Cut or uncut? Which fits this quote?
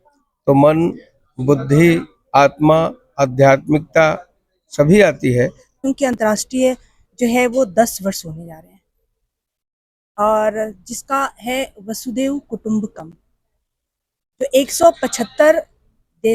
cut